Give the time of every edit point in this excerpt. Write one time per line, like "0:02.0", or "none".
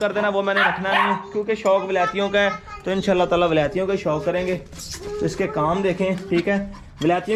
none